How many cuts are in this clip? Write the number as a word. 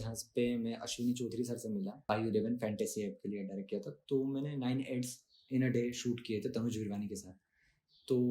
one